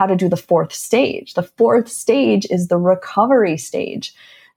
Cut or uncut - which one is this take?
uncut